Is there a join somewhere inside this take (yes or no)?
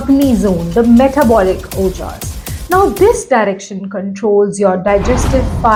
no